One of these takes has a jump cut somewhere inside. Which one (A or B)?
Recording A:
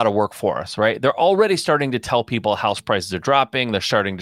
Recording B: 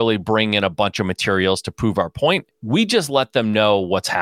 B